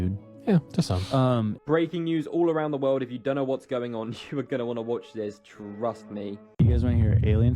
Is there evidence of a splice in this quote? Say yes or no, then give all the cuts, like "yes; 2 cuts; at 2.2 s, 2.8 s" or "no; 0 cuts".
yes; 2 cuts; at 1.6 s, 6.5 s